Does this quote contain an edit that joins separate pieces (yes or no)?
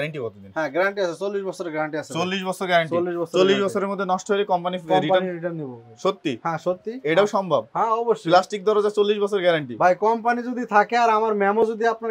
no